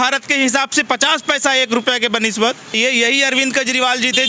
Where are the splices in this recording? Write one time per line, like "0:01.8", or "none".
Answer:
0:02.8